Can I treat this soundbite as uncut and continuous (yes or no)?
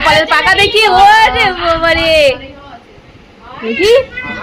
yes